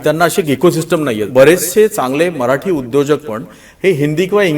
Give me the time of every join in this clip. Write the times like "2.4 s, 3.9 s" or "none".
1.3 s

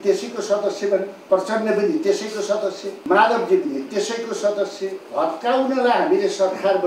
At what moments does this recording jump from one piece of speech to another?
1.1 s, 2.9 s, 5.0 s

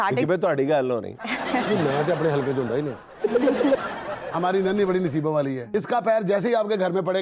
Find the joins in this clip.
3.9 s, 5.7 s

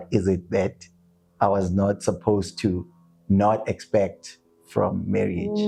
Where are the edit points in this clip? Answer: none

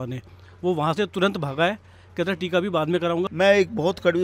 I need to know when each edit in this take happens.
3.3 s

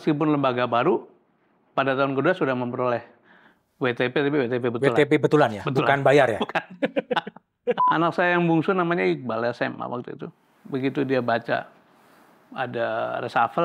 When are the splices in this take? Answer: 7.8 s

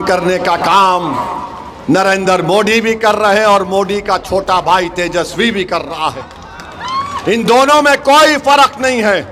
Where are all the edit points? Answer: none

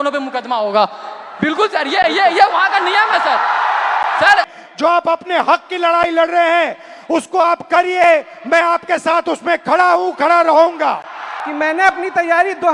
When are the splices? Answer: 4.5 s, 11.4 s

